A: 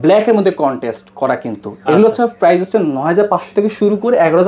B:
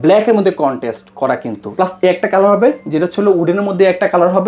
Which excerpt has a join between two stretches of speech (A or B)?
B